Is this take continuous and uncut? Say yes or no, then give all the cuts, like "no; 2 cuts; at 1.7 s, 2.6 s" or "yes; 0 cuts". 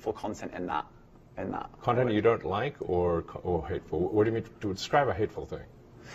yes; 0 cuts